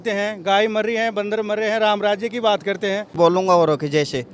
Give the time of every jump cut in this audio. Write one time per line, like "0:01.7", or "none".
0:03.1